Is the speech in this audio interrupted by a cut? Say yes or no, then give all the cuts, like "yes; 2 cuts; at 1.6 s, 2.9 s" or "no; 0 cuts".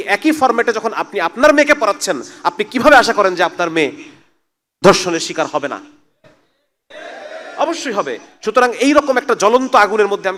no; 0 cuts